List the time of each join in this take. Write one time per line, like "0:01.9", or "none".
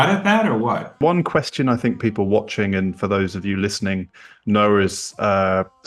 0:01.0